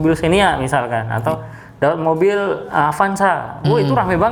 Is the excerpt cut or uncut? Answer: uncut